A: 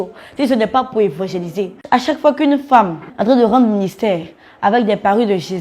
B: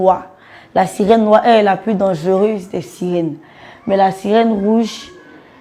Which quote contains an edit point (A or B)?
A